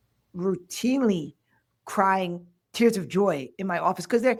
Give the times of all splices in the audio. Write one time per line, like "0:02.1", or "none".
none